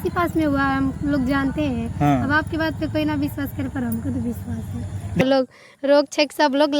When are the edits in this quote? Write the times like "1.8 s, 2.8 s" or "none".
5.2 s